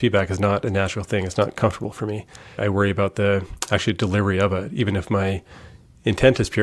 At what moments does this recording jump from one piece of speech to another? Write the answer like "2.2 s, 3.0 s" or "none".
none